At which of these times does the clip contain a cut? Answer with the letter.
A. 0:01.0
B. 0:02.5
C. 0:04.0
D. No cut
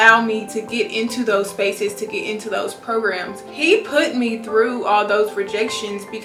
D